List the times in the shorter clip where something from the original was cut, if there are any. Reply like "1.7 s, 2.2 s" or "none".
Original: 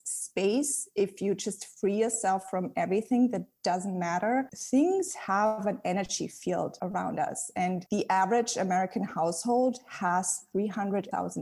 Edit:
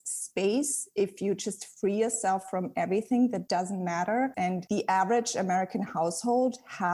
3.4 s, 4.5 s